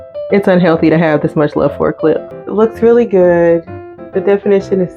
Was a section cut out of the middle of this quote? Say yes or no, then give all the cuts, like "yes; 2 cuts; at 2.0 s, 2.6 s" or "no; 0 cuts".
yes; 1 cut; at 2.4 s